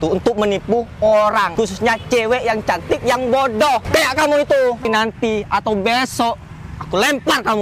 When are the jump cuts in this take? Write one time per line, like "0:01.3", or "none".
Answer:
0:01.5
0:03.8
0:04.9